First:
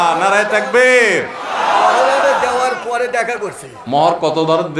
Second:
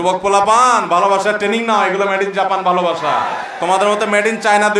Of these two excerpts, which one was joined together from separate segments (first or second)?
second